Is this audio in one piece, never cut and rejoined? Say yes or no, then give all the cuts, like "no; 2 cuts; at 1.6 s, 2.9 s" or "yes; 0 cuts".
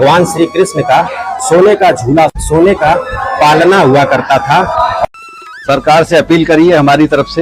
no; 2 cuts; at 2.4 s, 5.0 s